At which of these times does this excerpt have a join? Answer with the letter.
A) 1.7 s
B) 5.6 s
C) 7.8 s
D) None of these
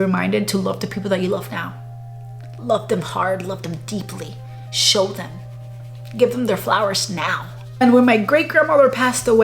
C